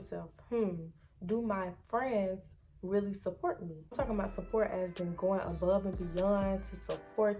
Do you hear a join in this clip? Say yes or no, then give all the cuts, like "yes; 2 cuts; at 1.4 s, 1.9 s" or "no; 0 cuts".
yes; 1 cut; at 3.9 s